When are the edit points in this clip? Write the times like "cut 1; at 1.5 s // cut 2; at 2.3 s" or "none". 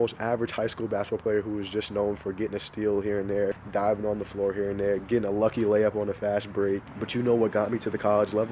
cut 1; at 3.6 s // cut 2; at 6.9 s